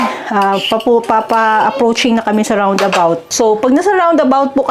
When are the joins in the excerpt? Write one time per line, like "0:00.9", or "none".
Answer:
0:03.2